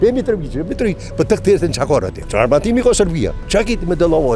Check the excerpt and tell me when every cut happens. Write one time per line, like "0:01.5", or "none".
0:02.2
0:03.4